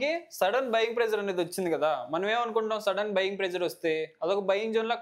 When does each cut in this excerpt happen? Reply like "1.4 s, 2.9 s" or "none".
none